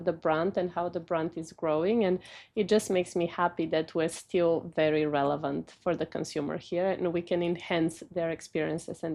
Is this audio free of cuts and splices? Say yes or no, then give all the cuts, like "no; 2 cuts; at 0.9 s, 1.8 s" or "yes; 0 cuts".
yes; 0 cuts